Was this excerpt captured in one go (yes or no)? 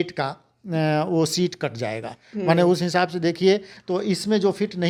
yes